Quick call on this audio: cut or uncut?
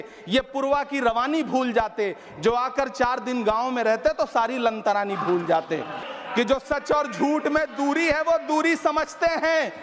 cut